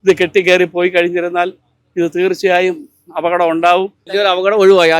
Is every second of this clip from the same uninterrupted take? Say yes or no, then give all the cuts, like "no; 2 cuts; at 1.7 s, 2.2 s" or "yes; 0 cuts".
no; 1 cut; at 4.0 s